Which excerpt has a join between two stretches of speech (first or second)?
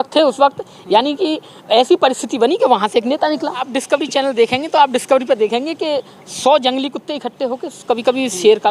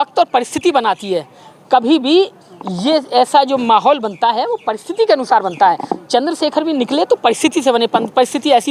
first